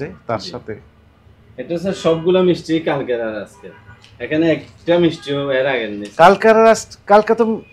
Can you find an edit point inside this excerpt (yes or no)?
no